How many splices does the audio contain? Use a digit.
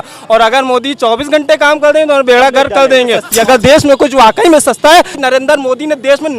2